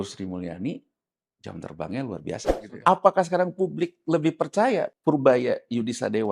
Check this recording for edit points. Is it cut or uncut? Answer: cut